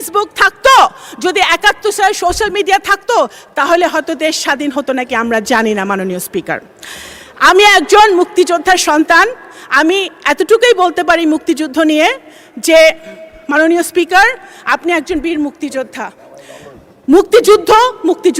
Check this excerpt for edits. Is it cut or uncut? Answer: uncut